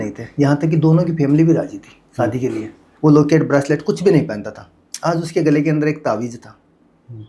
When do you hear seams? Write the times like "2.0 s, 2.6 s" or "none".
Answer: 2.8 s